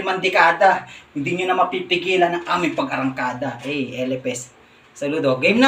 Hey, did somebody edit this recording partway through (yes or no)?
no